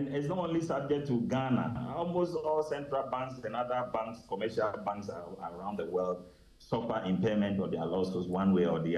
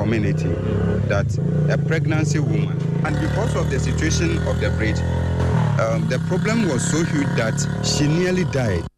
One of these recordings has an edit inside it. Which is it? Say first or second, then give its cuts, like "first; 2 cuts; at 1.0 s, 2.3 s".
second; 2 cuts; at 3.0 s, 7.7 s